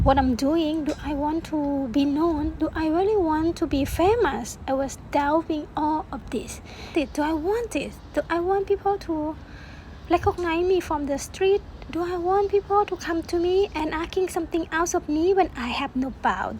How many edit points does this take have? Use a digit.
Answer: 2